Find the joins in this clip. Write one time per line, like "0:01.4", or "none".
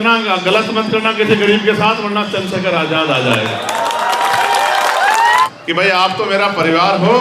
0:05.5